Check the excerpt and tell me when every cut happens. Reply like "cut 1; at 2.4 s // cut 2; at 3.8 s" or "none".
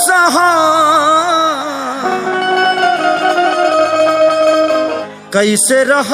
cut 1; at 5.1 s